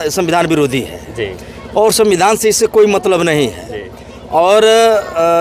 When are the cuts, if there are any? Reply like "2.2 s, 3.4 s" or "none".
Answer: none